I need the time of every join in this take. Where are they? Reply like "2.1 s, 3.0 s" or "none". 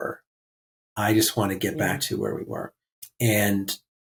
none